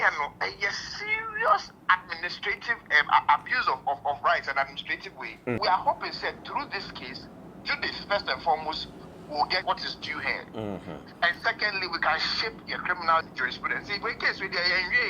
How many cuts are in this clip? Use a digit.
3